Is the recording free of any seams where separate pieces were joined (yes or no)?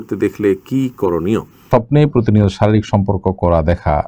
no